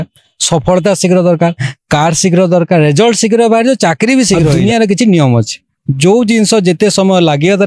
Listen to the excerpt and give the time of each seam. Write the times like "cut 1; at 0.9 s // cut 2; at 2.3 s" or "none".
cut 1; at 4.5 s